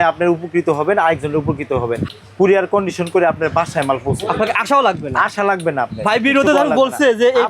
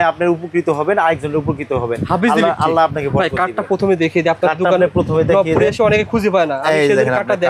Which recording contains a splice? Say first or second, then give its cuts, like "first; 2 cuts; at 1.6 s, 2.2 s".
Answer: first; 1 cut; at 2.0 s